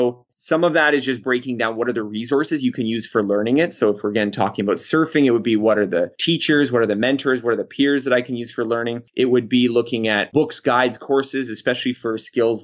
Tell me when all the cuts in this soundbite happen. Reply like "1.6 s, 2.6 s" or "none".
9.0 s, 10.3 s